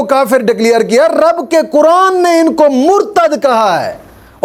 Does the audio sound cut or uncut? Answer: uncut